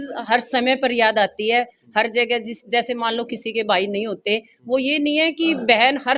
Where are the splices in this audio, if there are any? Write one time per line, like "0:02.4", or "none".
none